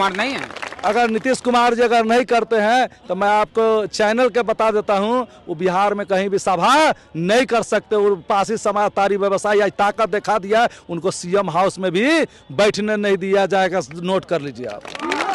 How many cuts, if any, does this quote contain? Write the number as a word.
zero